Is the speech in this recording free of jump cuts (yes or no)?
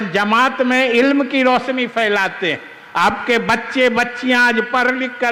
yes